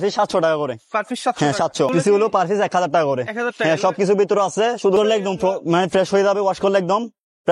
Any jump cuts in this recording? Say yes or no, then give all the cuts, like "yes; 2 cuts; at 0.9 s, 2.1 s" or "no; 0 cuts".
yes; 2 cuts; at 1.9 s, 5.0 s